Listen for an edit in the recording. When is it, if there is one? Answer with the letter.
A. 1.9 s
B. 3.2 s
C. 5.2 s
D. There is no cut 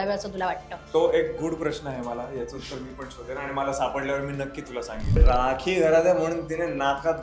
C